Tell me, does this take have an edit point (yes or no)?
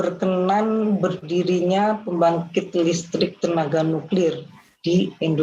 no